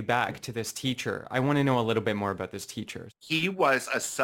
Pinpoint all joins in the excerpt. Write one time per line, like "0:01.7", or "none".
0:03.0